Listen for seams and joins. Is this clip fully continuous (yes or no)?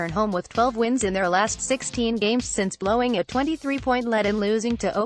yes